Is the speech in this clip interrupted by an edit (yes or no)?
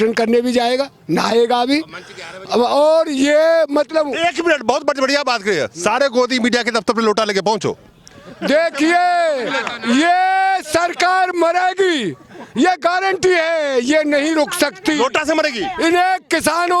no